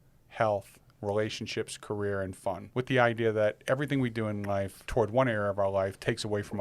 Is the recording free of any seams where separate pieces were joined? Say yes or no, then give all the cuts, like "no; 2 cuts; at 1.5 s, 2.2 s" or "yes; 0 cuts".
no; 2 cuts; at 2.6 s, 4.8 s